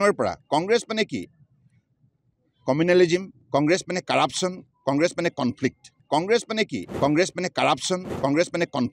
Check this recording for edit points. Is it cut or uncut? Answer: cut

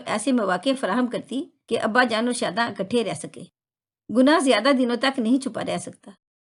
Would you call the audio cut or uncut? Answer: uncut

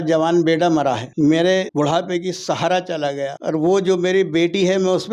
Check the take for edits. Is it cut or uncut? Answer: cut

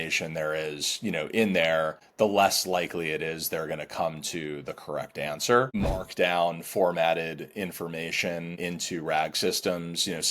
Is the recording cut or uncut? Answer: cut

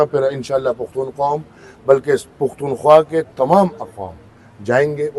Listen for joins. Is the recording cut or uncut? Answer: uncut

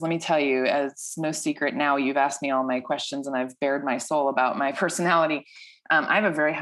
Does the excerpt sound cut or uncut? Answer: uncut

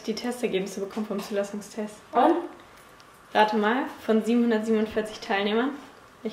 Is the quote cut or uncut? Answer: uncut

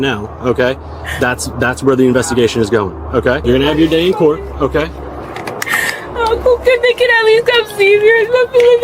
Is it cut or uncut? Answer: cut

